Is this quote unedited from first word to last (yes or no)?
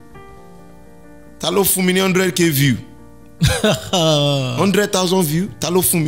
yes